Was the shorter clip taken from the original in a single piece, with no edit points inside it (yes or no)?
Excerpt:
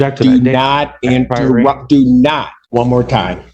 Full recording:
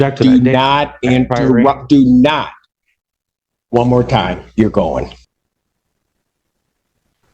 no